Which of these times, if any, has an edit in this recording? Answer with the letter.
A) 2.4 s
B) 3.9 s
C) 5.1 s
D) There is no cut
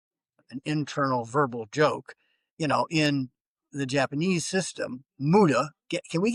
D